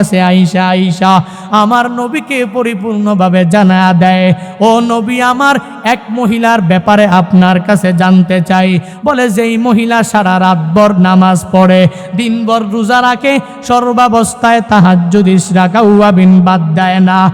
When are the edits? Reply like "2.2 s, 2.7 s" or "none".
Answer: 8.9 s